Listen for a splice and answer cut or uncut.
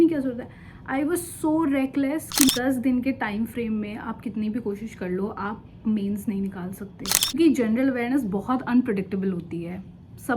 cut